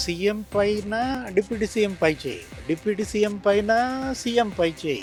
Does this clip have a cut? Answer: no; 0 cuts

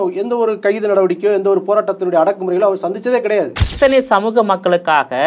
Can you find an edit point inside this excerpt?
yes; 1 cut; at 3.6 s

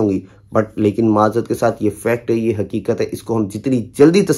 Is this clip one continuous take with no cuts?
yes; 0 cuts

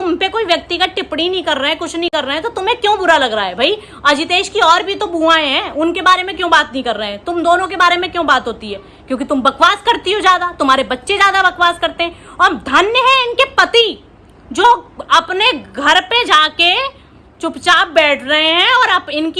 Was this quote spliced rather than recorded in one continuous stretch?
no; 0 cuts

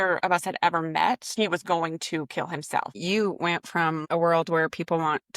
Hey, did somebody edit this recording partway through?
yes; 3 cuts; at 1.3 s, 2.9 s, 4.0 s

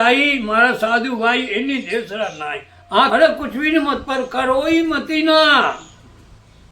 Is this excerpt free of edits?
no; 1 cut; at 3.1 s

